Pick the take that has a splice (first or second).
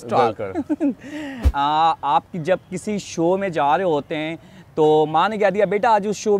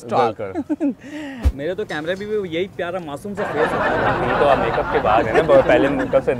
second